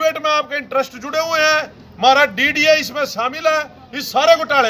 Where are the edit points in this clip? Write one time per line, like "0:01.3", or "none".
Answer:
none